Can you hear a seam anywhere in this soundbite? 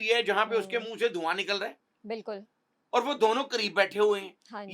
no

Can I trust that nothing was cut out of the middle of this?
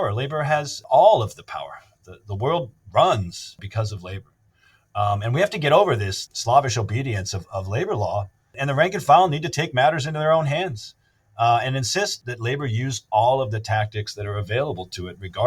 no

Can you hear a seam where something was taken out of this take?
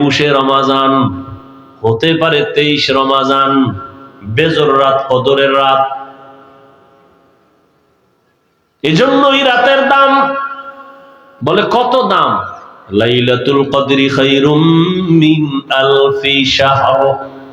no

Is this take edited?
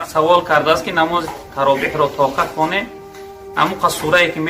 no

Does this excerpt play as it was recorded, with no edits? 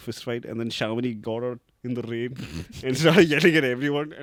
yes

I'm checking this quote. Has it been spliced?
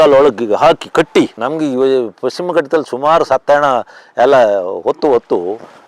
yes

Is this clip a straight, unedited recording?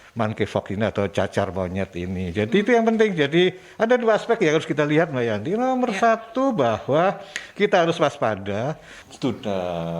no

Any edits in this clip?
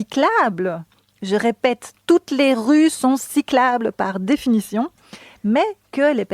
no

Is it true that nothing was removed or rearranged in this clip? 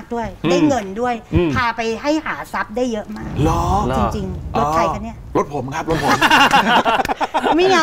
yes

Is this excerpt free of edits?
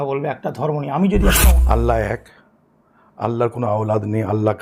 no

